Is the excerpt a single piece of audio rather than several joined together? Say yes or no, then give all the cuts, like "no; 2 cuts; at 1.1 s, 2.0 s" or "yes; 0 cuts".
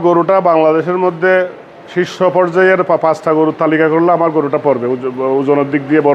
yes; 0 cuts